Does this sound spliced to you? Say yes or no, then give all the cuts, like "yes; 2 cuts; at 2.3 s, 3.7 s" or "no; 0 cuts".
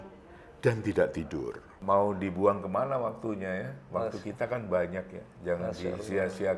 yes; 1 cut; at 1.7 s